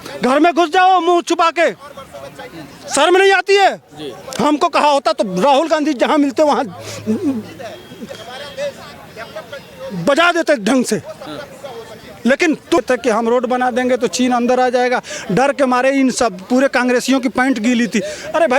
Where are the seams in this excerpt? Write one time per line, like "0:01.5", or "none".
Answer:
0:12.8